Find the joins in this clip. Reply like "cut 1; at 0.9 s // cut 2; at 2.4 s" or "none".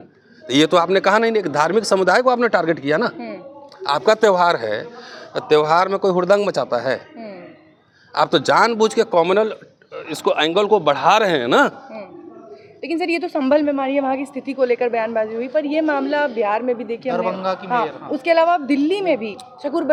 none